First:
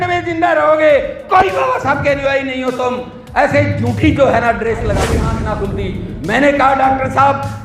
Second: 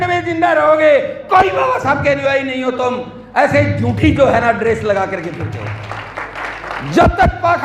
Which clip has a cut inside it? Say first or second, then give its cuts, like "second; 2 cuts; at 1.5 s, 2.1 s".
first; 1 cut; at 5.2 s